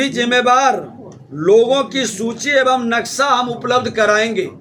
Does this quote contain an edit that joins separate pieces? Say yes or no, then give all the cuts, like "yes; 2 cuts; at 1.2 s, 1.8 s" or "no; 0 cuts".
no; 0 cuts